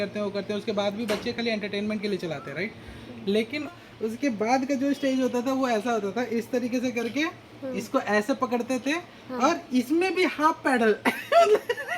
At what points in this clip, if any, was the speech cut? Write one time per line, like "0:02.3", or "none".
0:03.7